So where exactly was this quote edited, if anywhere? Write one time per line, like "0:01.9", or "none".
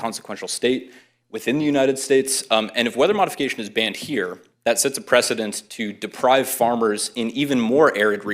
none